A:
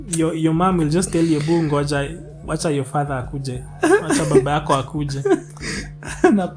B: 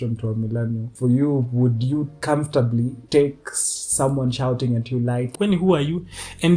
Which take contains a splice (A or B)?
B